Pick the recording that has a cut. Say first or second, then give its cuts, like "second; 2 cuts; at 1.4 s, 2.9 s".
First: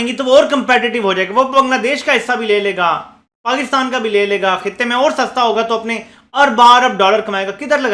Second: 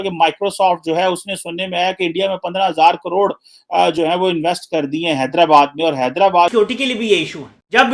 second; 1 cut; at 6.5 s